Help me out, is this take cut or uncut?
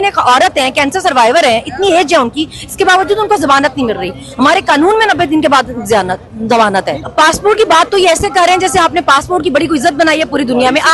cut